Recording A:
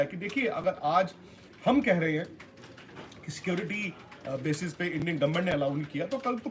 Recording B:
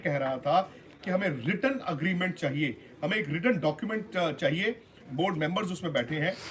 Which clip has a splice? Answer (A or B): B